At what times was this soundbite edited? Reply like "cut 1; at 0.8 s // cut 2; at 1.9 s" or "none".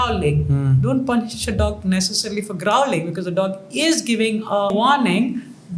cut 1; at 4.7 s